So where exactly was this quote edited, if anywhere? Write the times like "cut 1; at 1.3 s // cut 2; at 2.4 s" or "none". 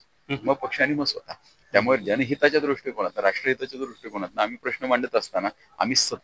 none